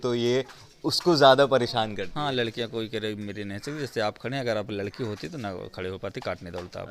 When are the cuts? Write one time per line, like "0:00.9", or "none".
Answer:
none